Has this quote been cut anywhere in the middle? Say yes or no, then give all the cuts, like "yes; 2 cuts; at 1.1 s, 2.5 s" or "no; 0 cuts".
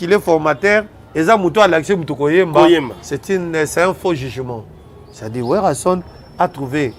no; 0 cuts